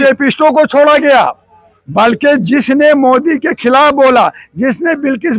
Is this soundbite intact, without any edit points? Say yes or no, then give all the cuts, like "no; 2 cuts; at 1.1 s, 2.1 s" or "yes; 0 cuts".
yes; 0 cuts